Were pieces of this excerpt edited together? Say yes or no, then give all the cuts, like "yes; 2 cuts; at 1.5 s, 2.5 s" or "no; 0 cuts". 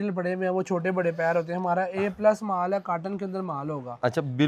no; 0 cuts